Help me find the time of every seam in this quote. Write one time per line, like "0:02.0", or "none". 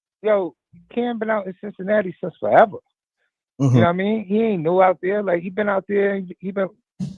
none